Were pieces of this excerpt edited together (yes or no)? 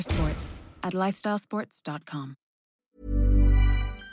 yes